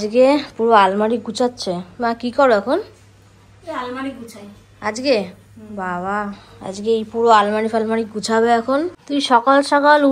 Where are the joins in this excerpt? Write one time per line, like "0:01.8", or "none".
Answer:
0:09.0